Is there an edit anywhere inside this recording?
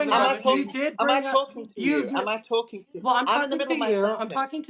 no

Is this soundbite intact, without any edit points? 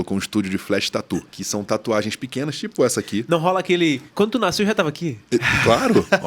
no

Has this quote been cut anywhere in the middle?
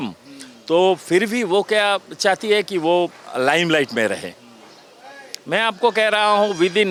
no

